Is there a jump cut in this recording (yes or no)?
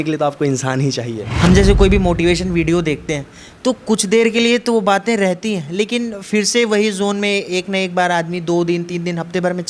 yes